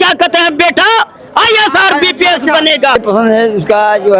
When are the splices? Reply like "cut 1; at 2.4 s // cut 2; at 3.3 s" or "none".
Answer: cut 1; at 3.0 s